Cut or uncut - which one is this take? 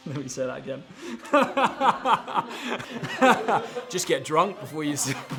uncut